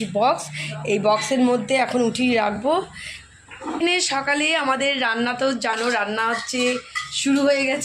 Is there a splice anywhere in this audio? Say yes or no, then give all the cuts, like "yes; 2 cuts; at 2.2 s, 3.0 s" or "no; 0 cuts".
yes; 1 cut; at 3.8 s